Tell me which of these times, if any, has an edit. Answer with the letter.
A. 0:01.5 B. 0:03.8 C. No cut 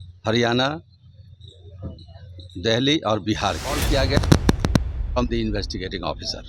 B